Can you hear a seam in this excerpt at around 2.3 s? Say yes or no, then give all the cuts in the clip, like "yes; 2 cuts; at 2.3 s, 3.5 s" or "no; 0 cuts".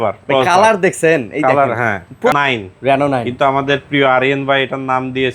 yes; 1 cut; at 2.3 s